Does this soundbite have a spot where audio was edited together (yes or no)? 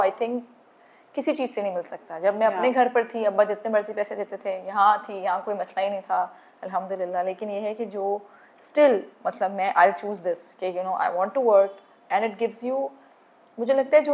no